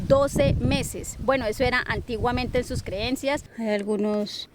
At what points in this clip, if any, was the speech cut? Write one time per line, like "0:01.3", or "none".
0:03.4